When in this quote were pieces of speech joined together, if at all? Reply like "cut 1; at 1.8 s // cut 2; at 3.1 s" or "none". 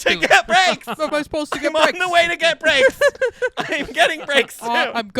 cut 1; at 1.1 s